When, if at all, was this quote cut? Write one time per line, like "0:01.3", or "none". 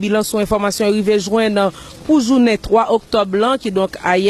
0:01.0